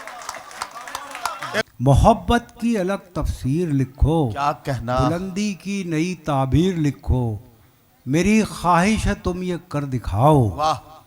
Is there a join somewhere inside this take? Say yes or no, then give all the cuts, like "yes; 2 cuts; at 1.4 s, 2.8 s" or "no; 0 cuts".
yes; 1 cut; at 1.6 s